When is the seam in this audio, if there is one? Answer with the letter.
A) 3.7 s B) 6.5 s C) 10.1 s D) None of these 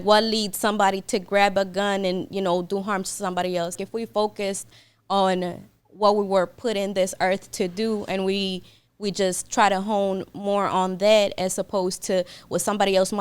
A